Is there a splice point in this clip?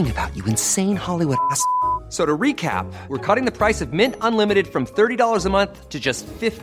no; 0 cuts

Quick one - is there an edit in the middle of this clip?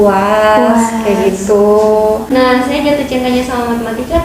yes; 1 cut; at 2.3 s

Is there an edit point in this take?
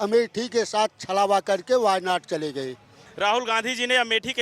yes; 1 cut; at 3.1 s

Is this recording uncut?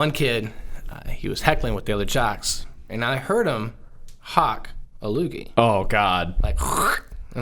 no; 1 cut; at 2.9 s

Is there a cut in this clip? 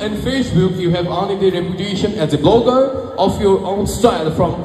no; 0 cuts

